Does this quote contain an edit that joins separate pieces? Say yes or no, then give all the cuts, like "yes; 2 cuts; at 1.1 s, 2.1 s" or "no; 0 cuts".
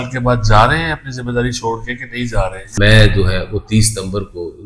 yes; 1 cut; at 2.7 s